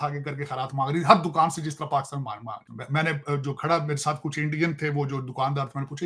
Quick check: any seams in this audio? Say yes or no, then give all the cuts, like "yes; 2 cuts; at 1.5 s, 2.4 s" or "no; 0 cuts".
yes; 1 cut; at 2.7 s